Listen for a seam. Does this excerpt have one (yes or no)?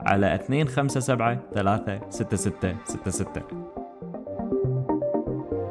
yes